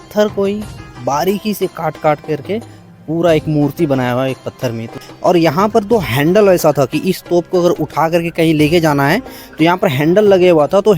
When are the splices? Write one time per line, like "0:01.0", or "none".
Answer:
0:05.0